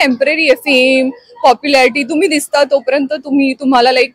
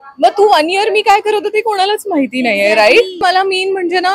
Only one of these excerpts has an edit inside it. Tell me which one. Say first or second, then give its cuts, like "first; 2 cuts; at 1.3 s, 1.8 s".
second; 1 cut; at 3.2 s